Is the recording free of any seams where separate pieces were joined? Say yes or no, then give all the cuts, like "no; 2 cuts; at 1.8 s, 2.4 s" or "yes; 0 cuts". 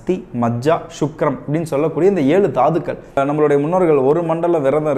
no; 1 cut; at 3.2 s